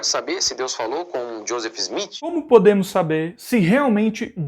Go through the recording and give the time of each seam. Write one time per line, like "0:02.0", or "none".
0:02.4